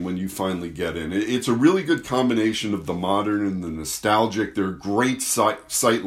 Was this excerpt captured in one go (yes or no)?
yes